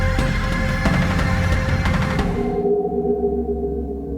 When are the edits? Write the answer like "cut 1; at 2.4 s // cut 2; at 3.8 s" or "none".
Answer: cut 1; at 2.3 s